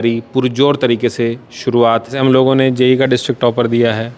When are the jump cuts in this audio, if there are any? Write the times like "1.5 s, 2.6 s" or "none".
2.2 s